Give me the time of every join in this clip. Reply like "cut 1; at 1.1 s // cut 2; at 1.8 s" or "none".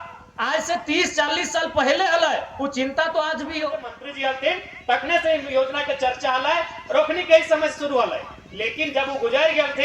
cut 1; at 4.0 s